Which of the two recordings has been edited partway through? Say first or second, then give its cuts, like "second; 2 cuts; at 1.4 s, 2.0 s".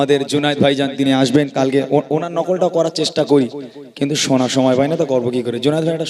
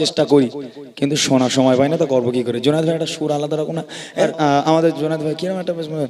second; 1 cut; at 4.2 s